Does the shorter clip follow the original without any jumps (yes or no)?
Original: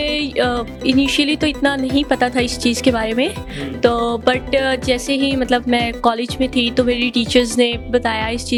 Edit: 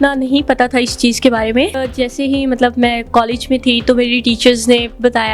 no